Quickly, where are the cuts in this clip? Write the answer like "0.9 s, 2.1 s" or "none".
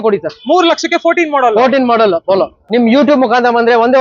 2.6 s